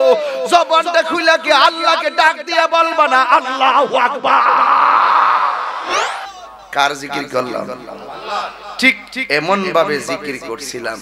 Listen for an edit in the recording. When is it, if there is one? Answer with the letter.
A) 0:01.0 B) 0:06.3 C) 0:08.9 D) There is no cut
B